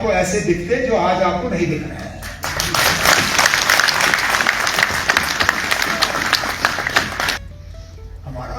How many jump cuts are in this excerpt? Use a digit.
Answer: 1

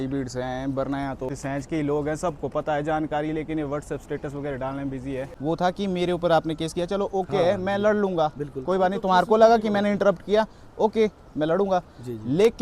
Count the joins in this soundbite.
2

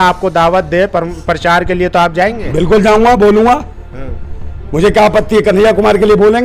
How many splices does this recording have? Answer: 0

